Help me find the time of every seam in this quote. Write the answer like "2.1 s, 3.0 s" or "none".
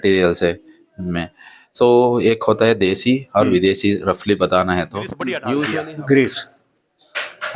5.7 s